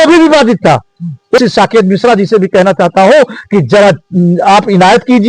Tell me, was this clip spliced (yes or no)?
yes